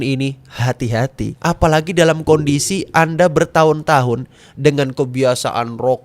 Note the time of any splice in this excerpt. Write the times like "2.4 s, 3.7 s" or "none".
1.3 s